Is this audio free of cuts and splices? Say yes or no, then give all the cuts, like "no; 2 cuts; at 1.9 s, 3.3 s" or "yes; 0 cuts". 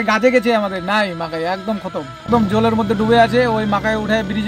no; 1 cut; at 2.2 s